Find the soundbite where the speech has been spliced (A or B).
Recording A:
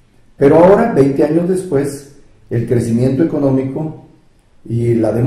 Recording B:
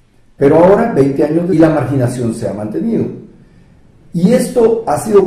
A